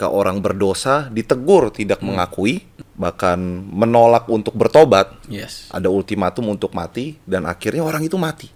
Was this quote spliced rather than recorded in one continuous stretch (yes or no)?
yes